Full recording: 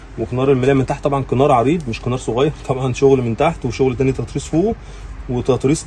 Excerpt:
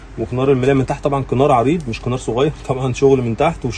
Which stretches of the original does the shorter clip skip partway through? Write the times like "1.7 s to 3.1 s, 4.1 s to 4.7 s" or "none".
none

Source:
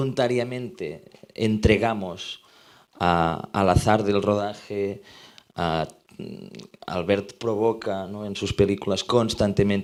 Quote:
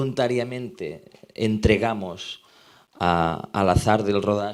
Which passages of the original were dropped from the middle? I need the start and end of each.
none

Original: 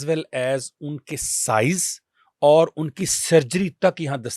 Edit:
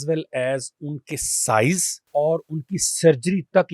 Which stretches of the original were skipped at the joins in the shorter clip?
1.9 s to 2.2 s

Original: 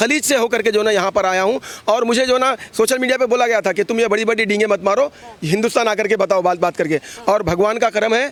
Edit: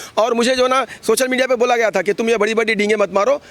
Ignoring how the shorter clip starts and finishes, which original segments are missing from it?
none

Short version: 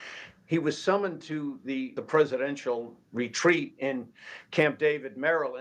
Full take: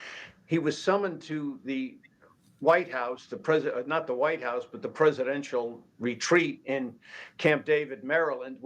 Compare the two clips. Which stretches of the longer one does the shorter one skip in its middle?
1.9 s to 4.8 s

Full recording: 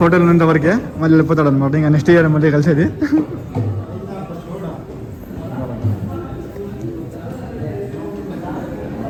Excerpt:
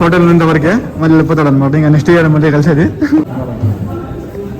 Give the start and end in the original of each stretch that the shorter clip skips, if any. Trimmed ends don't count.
3.3 s to 5.5 s

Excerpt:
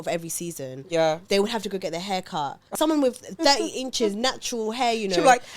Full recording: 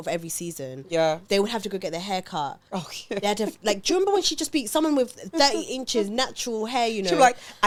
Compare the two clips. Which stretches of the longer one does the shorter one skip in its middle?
2.7 s to 4.7 s

